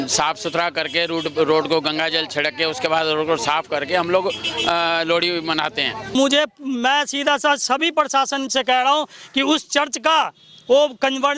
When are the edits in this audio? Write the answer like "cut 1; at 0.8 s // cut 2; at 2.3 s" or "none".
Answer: cut 1; at 6.1 s